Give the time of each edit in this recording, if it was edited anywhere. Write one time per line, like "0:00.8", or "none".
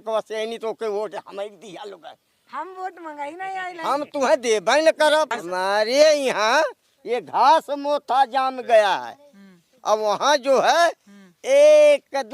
0:05.4